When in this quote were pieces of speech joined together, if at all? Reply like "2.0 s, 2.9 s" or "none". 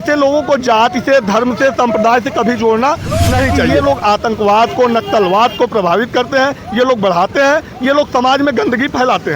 3.7 s